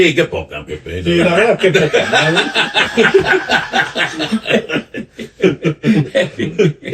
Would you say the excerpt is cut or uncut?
uncut